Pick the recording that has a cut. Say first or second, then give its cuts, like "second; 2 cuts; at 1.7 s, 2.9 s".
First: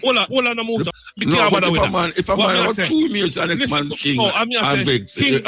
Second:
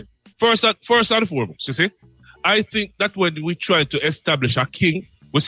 first; 1 cut; at 1.0 s